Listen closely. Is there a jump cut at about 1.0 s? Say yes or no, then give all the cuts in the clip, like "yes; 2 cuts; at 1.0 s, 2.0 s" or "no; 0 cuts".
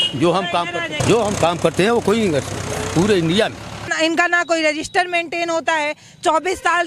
yes; 2 cuts; at 1.0 s, 3.9 s